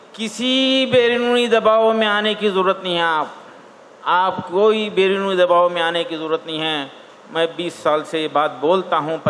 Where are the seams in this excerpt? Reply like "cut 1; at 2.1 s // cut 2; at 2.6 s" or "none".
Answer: none